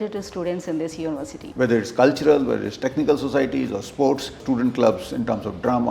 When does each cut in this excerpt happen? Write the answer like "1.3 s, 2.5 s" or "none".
1.4 s, 4.4 s